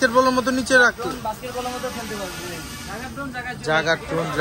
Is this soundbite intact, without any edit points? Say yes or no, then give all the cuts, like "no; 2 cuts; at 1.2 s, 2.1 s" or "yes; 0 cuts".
yes; 0 cuts